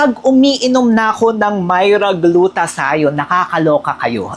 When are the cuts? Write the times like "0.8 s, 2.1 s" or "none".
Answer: none